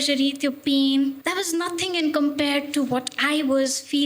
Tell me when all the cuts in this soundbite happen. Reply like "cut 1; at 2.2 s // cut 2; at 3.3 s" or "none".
cut 1; at 1.2 s